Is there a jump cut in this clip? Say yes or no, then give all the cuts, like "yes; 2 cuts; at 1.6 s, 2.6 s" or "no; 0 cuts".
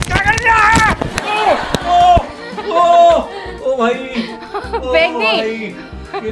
no; 0 cuts